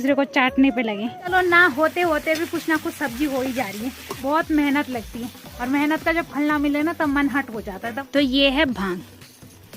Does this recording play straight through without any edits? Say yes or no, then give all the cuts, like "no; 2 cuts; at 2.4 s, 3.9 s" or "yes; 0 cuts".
no; 3 cuts; at 1.3 s, 4.1 s, 8.0 s